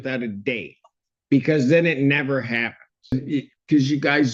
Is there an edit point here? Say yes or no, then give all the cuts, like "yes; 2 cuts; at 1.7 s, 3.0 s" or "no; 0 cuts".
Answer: yes; 1 cut; at 3.1 s